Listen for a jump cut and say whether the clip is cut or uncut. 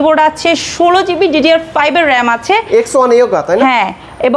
uncut